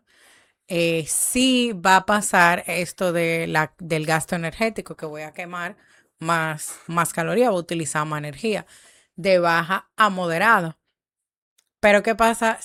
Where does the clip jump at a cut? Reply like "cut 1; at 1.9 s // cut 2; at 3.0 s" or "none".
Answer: none